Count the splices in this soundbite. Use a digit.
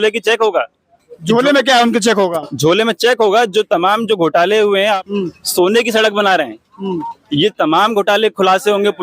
1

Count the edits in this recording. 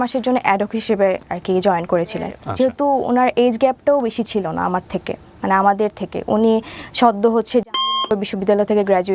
1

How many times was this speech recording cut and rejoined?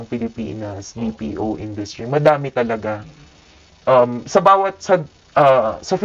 0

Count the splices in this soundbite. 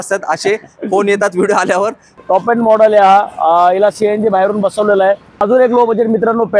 2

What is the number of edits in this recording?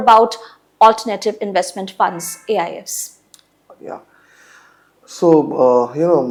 0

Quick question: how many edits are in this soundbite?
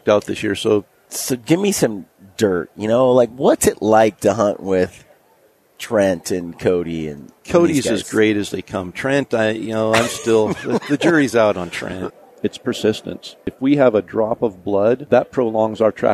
3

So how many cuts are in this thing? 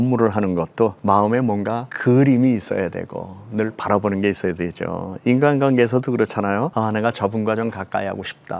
3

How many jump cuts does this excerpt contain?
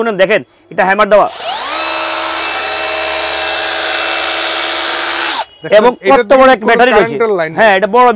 0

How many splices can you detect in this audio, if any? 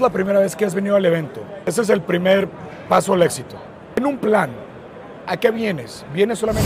2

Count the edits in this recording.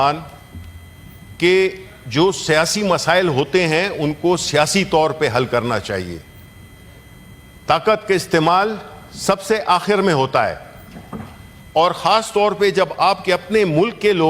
0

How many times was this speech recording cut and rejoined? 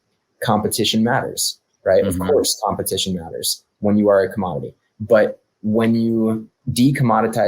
1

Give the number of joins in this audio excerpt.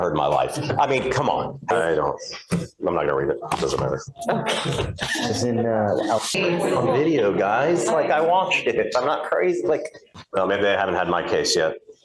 3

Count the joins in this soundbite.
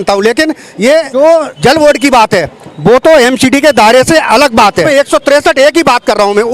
2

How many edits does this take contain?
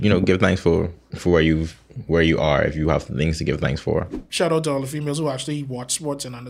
2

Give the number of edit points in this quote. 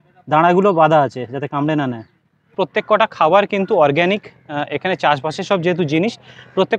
1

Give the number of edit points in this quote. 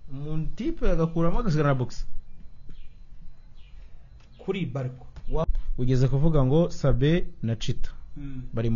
1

